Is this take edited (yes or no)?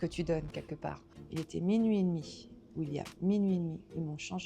yes